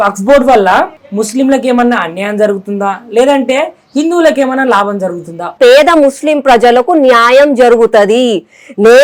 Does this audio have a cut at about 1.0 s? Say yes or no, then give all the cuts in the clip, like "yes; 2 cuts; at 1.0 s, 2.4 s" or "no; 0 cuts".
yes; 2 cuts; at 1.0 s, 5.5 s